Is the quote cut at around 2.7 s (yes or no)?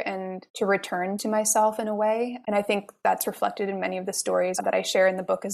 no